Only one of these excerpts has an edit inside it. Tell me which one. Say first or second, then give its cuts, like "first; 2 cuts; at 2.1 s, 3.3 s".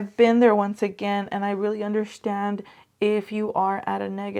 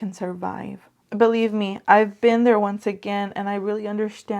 second; 1 cut; at 0.9 s